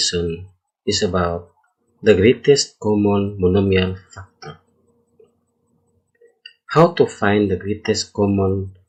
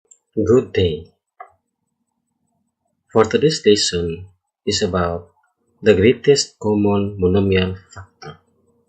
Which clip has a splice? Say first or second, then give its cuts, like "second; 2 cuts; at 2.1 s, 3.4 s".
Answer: second; 1 cut; at 1.0 s